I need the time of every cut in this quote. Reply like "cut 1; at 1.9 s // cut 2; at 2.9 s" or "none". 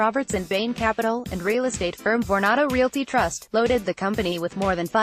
none

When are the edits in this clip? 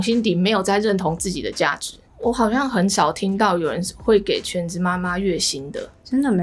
cut 1; at 2.1 s

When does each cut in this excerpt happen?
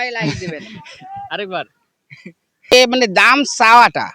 cut 1; at 2.7 s

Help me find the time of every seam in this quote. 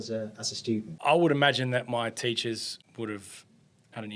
cut 1; at 0.9 s // cut 2; at 2.8 s

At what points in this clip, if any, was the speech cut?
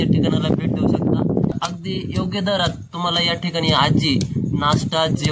cut 1; at 1.5 s

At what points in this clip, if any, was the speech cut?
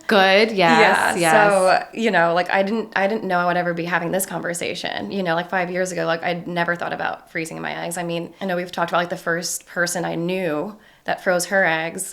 cut 1; at 8.3 s

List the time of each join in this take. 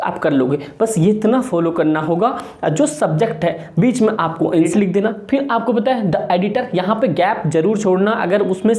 cut 1; at 4.7 s

